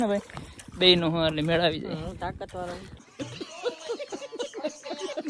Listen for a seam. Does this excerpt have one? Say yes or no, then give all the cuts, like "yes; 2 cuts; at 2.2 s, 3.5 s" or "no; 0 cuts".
no; 0 cuts